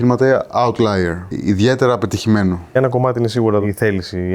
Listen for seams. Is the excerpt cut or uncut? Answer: cut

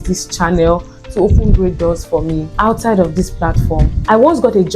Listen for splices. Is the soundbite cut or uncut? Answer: cut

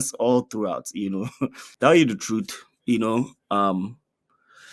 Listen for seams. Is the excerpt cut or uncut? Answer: cut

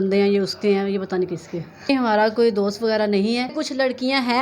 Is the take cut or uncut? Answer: cut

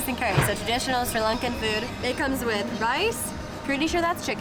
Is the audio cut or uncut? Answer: uncut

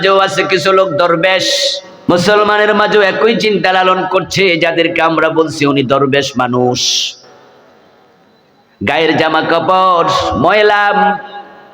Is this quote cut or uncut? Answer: cut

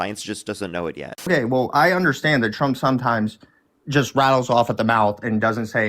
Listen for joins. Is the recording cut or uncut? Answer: cut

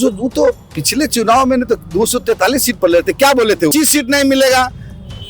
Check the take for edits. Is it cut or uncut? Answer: cut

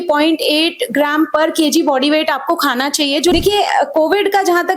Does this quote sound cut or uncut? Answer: cut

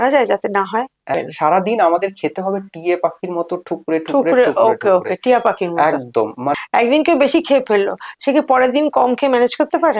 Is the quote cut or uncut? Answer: cut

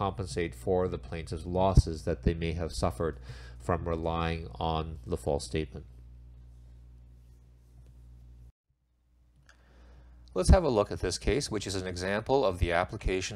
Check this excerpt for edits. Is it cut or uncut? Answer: cut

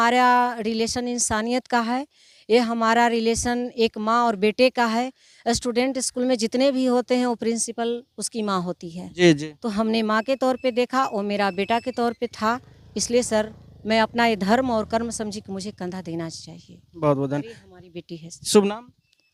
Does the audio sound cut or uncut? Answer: uncut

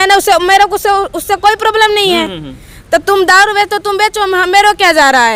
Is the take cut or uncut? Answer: uncut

